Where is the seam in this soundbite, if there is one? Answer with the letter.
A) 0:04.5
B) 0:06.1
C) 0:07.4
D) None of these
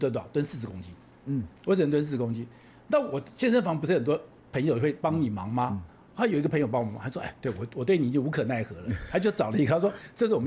D